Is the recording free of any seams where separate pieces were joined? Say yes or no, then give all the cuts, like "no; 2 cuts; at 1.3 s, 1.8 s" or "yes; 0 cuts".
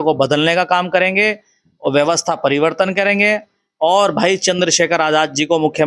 yes; 0 cuts